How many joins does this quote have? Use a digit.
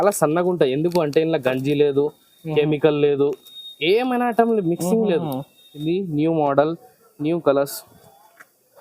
1